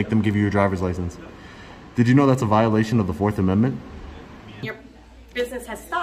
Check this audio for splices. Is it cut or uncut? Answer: cut